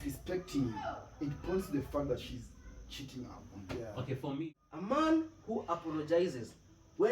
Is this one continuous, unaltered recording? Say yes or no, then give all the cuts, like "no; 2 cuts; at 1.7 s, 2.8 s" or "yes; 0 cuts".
no; 1 cut; at 4.4 s